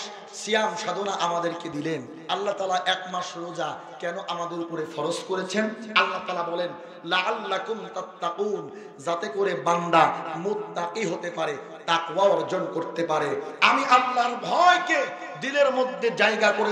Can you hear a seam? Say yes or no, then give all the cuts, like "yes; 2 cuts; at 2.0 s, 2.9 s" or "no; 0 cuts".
yes; 1 cut; at 2.1 s